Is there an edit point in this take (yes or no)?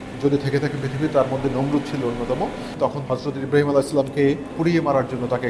yes